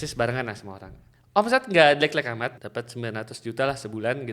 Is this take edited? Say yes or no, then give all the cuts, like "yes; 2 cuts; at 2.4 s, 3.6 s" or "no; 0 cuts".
yes; 1 cut; at 2.6 s